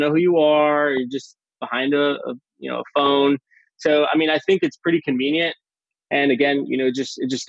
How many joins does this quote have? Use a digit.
0